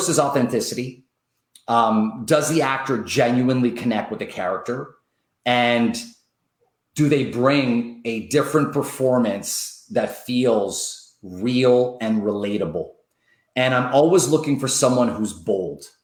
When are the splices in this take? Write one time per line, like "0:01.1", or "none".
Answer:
none